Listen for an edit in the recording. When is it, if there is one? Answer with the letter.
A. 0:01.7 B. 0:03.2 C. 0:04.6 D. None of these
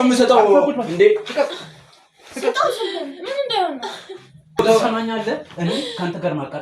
C